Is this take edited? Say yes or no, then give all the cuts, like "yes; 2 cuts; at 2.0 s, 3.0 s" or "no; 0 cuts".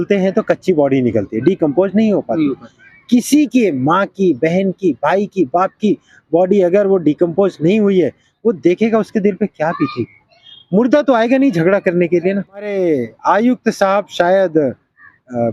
yes; 1 cut; at 12.7 s